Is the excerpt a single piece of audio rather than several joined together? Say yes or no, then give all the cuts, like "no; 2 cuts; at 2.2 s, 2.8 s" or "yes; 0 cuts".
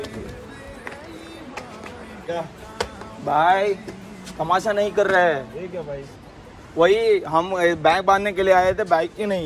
no; 1 cut; at 2.3 s